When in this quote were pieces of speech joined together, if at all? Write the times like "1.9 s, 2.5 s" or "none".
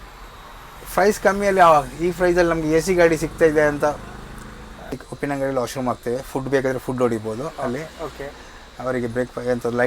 5.0 s